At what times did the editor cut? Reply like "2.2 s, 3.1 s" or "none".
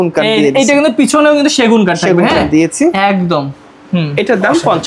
none